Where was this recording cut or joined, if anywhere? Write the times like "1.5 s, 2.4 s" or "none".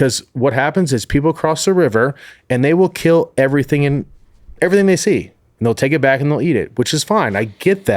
5.4 s